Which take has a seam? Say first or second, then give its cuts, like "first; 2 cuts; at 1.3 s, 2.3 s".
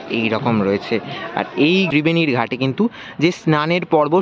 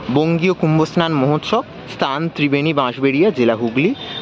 first; 1 cut; at 1.9 s